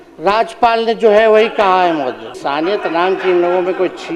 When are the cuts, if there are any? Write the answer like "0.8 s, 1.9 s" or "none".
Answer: 2.4 s